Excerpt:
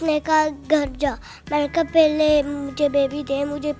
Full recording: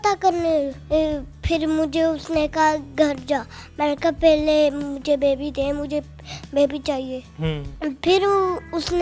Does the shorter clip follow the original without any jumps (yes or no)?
yes